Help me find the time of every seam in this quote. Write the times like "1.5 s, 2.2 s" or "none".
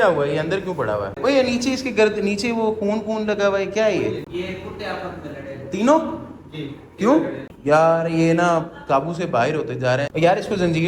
1.1 s, 4.3 s, 7.5 s, 10.1 s